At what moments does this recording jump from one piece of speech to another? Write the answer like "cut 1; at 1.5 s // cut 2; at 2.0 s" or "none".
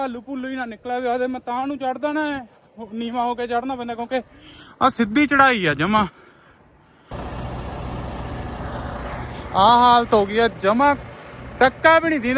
cut 1; at 7.1 s